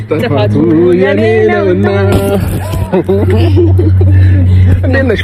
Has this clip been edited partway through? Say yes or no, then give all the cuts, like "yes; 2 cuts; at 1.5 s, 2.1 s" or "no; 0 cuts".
no; 0 cuts